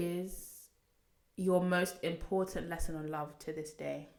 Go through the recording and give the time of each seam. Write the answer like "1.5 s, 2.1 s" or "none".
none